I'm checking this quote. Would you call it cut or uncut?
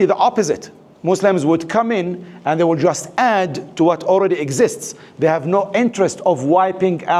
uncut